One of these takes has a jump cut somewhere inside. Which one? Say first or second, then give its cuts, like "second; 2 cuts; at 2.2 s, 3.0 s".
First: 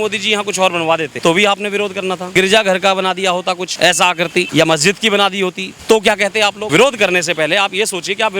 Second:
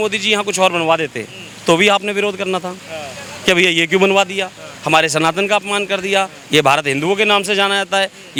first; 6 cuts; at 1.1 s, 2.2 s, 3.7 s, 4.5 s, 5.7 s, 6.6 s